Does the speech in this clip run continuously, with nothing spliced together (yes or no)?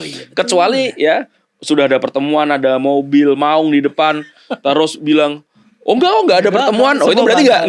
yes